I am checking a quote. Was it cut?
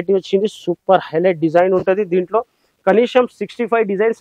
no; 0 cuts

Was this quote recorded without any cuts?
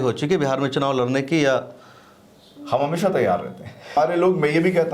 no; 1 cut; at 3.9 s

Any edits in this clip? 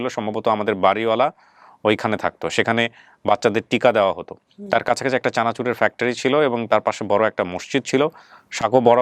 no; 0 cuts

